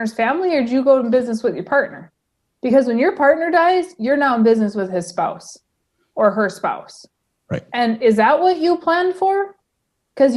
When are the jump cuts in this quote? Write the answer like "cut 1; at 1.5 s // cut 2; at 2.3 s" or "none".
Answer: none